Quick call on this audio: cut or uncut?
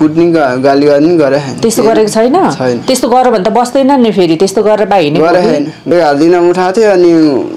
cut